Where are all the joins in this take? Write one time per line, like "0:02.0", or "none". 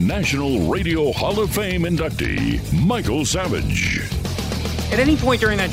0:04.8

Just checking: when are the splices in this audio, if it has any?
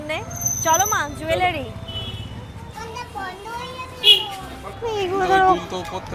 0:02.7
0:04.7

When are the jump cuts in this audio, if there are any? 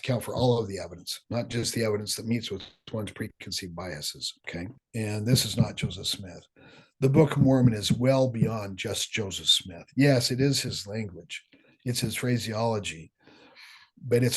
0:04.8

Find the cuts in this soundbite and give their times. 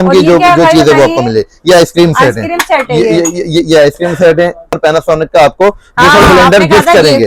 0:04.8

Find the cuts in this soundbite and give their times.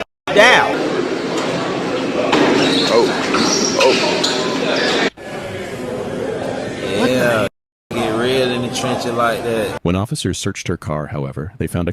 0:09.8

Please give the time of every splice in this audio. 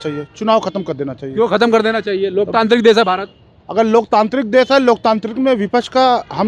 none

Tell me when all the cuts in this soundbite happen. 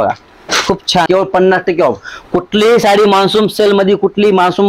0:01.1

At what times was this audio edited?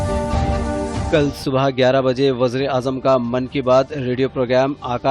0:01.0

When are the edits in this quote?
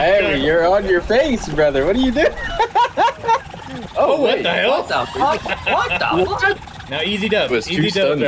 0:06.7

